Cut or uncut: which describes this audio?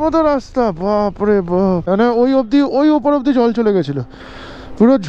cut